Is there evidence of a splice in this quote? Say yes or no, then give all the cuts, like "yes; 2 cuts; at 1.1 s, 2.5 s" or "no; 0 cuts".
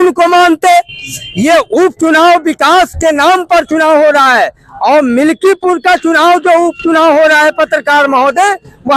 no; 0 cuts